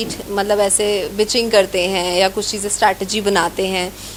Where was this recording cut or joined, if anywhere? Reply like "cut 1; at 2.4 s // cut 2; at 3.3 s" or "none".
none